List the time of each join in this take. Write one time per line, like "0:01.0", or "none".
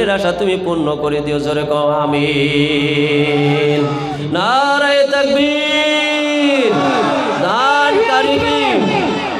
none